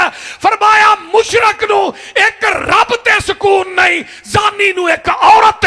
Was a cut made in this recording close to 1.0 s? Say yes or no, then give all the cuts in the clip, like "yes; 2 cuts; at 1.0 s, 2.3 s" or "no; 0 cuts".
no; 0 cuts